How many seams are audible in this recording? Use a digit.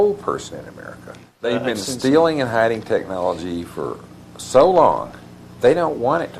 1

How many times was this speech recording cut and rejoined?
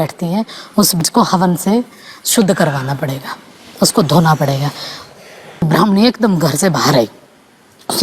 2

